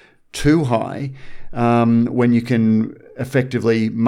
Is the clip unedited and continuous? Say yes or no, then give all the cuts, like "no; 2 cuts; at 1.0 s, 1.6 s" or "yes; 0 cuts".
yes; 0 cuts